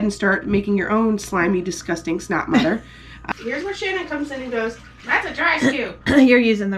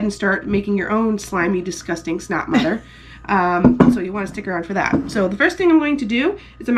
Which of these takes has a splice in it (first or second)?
first